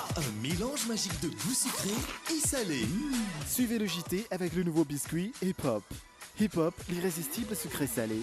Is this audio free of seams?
yes; 0 cuts

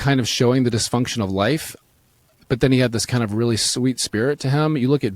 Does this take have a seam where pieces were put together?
yes; 1 cut; at 2.3 s

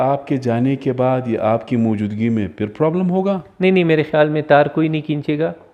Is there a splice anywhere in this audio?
no; 0 cuts

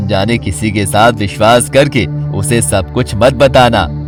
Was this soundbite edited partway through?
no; 0 cuts

